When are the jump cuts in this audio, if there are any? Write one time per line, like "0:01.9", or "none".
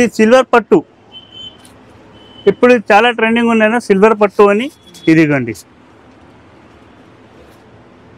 none